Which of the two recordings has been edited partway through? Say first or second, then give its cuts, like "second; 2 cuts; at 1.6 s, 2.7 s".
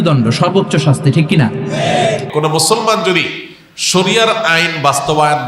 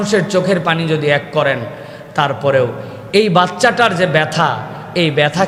first; 1 cut; at 2.3 s